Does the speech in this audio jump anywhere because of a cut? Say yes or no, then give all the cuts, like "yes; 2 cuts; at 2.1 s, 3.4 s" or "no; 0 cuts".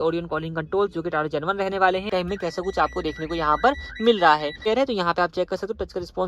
yes; 2 cuts; at 2.1 s, 4.7 s